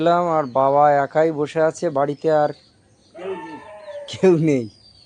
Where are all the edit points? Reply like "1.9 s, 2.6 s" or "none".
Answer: none